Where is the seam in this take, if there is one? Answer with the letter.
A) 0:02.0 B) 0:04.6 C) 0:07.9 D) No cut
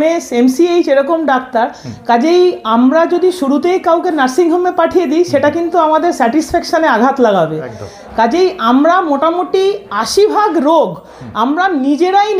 D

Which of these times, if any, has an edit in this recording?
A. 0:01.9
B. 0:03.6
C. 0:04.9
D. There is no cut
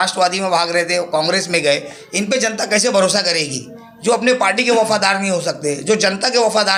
D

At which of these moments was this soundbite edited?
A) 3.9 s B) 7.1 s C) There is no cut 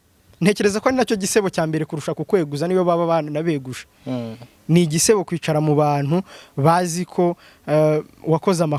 C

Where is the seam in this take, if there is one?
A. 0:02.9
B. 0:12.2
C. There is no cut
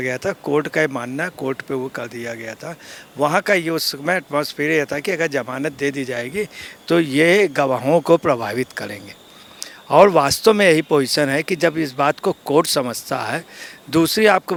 C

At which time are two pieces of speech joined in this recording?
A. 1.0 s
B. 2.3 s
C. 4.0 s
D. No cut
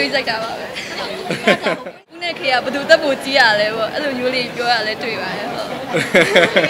B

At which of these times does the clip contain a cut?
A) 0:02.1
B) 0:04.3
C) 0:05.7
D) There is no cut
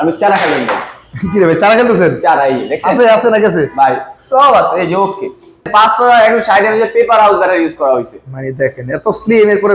C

